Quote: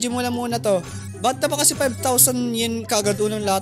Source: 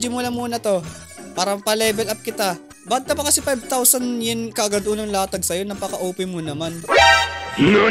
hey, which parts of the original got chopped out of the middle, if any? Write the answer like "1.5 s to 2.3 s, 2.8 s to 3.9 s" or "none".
1.0 s to 2.7 s